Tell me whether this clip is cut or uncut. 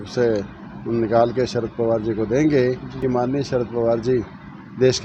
cut